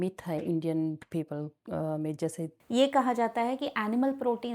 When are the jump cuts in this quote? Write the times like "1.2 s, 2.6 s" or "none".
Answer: 2.5 s